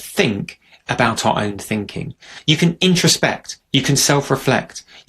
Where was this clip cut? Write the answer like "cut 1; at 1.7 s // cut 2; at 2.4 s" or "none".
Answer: cut 1; at 2.3 s